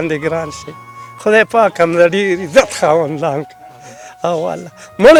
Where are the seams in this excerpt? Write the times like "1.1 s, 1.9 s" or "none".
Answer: none